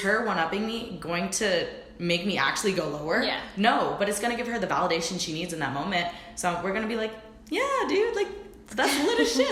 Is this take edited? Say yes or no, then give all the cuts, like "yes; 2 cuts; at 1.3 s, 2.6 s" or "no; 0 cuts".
no; 0 cuts